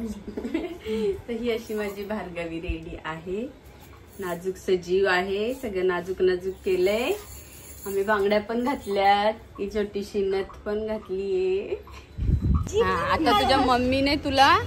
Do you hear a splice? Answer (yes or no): yes